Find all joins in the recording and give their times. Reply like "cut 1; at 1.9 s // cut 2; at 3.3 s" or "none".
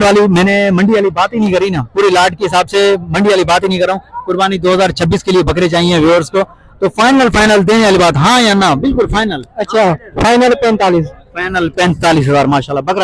none